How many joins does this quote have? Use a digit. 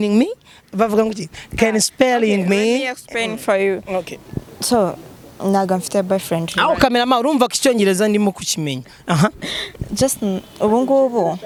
0